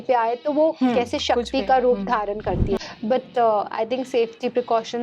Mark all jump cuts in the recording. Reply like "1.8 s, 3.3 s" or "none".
2.8 s